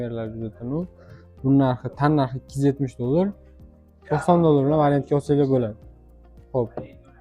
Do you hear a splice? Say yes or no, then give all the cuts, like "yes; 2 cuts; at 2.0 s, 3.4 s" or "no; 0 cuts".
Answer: no; 0 cuts